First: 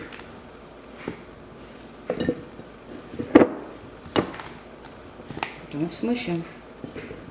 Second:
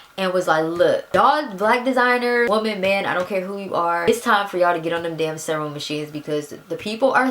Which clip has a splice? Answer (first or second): second